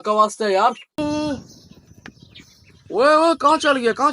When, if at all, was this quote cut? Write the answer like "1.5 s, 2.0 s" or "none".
1.0 s